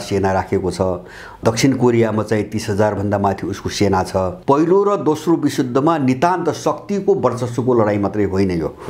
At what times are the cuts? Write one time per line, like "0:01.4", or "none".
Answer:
0:01.4
0:04.3